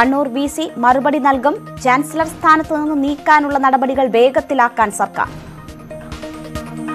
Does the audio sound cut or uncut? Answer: uncut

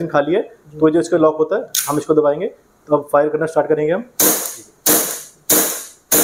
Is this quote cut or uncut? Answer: uncut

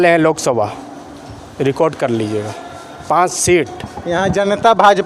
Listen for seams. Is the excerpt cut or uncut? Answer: uncut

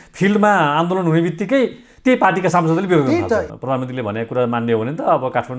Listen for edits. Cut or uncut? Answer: cut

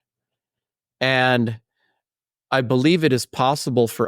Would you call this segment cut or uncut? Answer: cut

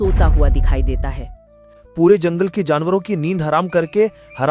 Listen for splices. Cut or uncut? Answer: uncut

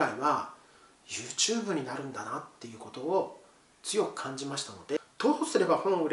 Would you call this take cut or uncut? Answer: cut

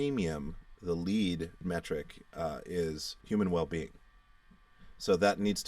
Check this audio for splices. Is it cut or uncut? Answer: cut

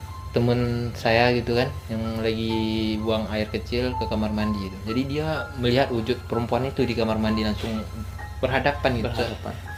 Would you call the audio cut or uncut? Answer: uncut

